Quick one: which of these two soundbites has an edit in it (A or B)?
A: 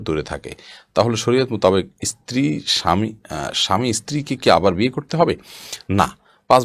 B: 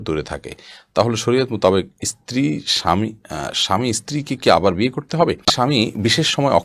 B